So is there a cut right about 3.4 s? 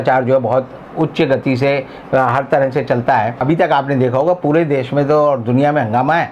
yes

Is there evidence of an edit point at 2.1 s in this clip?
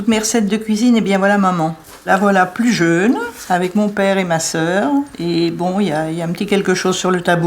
yes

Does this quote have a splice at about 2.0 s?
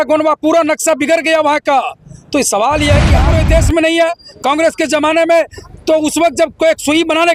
no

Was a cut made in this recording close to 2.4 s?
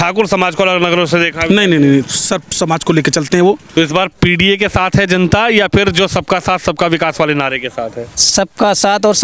no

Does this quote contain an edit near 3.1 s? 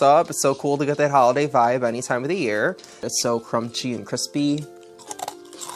yes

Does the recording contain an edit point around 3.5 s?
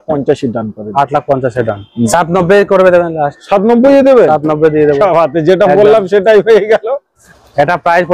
no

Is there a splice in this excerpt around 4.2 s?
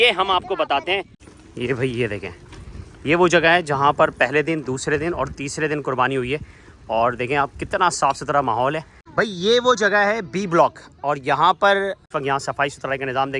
no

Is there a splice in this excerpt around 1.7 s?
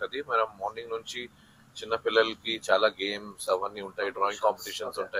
no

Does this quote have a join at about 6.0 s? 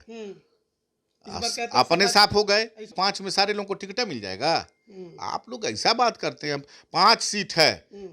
no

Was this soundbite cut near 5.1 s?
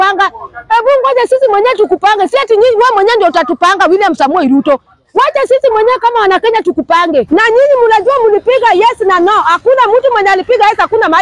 no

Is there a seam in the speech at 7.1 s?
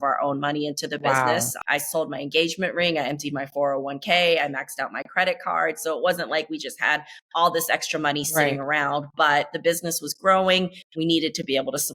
no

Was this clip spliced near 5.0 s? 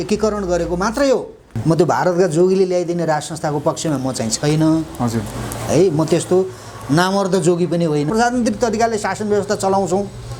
no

